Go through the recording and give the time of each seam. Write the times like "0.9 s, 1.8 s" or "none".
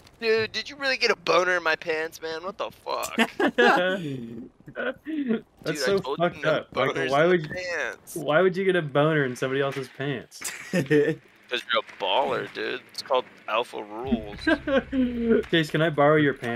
none